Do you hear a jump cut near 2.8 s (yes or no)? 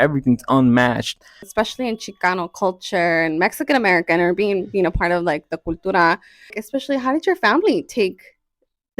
no